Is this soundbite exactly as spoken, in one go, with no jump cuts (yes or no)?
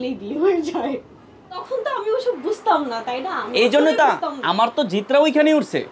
no